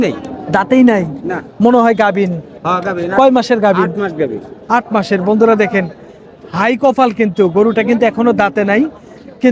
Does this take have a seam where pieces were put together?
no; 0 cuts

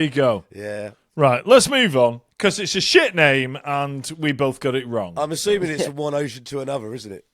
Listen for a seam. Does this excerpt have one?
yes; 1 cut; at 2.3 s

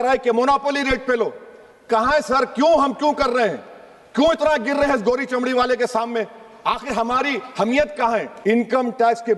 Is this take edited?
yes; 1 cut; at 8.3 s

